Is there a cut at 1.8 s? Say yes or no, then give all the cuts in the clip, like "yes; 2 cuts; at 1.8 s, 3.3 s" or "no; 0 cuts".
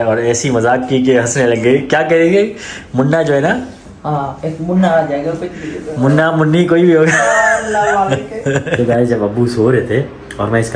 no; 1 cut; at 8.8 s